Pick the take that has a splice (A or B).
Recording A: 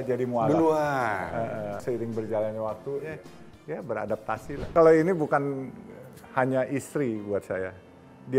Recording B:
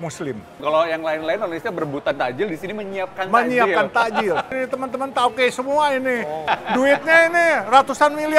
A